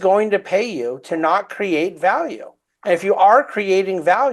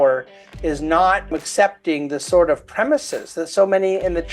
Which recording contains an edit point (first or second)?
second